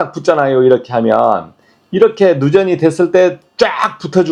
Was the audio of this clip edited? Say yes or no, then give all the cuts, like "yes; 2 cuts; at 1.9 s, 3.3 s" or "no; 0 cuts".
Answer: no; 0 cuts